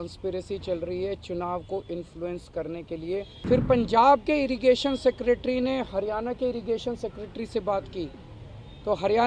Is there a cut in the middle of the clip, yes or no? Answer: yes